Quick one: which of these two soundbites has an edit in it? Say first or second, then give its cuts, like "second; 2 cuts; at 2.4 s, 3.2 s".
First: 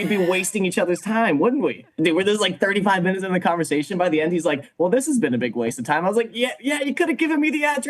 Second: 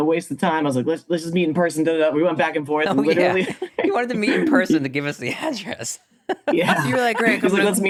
first; 1 cut; at 1.8 s